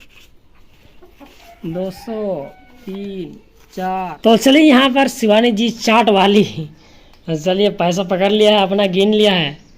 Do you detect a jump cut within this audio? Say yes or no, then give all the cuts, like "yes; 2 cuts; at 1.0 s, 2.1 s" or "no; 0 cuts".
yes; 1 cut; at 4.1 s